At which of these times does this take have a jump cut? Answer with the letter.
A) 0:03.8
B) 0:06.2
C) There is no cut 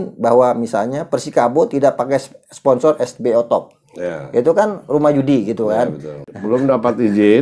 B